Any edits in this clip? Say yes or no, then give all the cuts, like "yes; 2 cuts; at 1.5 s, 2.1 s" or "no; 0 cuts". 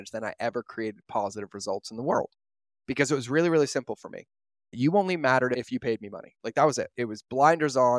yes; 3 cuts; at 4.7 s, 5.6 s, 6.9 s